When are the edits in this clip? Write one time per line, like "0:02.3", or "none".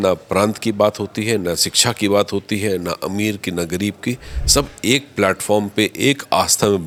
none